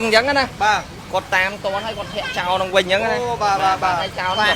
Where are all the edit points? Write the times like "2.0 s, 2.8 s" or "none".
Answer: none